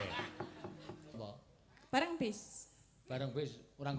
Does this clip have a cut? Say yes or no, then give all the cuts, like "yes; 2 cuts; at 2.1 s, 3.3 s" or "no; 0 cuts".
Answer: yes; 1 cut; at 1.2 s